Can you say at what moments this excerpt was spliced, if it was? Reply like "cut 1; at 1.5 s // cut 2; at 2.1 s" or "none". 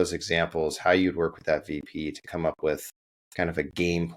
none